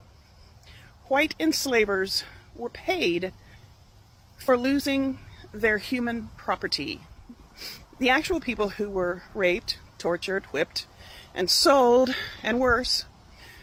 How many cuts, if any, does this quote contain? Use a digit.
0